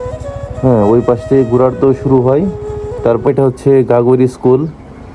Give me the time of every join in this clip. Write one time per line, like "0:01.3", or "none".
0:03.3